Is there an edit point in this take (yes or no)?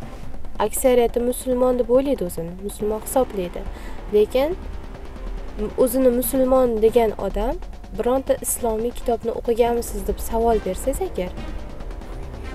no